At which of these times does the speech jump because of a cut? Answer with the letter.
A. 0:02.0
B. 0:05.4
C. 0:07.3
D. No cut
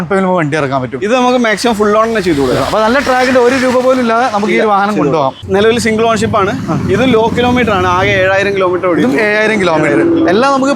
B